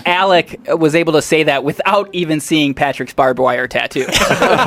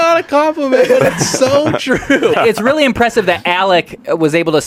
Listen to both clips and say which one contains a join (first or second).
second